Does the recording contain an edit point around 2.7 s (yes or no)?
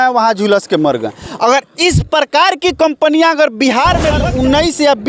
no